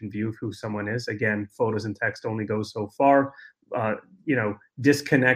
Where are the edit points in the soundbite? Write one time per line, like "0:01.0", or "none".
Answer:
none